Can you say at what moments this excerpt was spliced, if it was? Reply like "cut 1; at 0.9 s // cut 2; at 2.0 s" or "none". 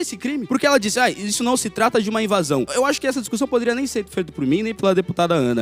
none